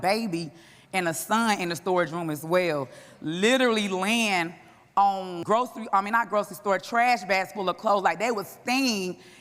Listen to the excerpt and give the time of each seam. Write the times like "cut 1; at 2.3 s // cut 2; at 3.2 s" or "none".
cut 1; at 5.3 s